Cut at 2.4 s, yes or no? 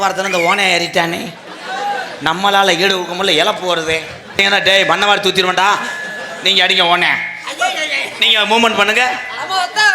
no